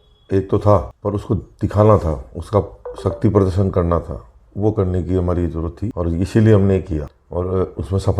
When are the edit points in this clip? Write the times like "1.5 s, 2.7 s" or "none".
0.9 s, 5.8 s, 7.2 s